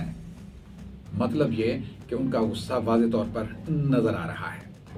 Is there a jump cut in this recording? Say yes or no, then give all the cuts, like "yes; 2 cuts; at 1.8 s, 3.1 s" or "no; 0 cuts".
no; 0 cuts